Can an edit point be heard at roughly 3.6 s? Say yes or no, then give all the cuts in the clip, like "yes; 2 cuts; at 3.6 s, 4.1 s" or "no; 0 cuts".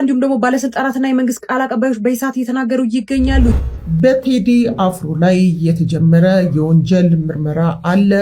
yes; 1 cut; at 3.6 s